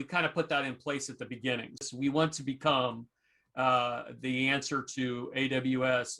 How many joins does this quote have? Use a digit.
1